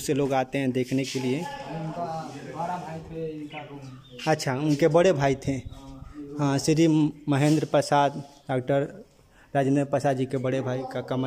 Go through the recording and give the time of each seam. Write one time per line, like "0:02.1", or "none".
none